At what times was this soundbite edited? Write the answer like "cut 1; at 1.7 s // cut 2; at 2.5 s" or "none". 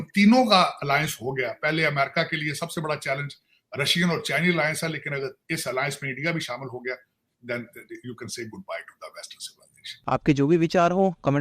cut 1; at 10.1 s